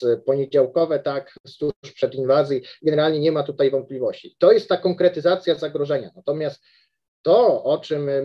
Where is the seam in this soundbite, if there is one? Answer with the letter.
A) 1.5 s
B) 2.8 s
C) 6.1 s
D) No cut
D